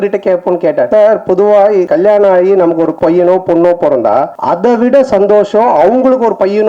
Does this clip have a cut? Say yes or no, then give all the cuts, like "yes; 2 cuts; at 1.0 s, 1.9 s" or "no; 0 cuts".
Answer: yes; 4 cuts; at 0.9 s, 1.9 s, 2.9 s, 4.3 s